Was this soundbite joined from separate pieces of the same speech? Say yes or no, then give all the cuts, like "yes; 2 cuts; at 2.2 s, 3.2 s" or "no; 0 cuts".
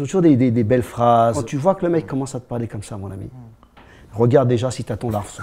yes; 1 cut; at 1.4 s